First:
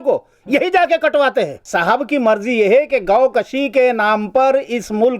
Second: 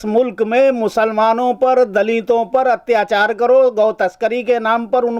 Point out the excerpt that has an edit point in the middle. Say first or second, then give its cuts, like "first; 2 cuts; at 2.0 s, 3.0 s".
first; 1 cut; at 1.6 s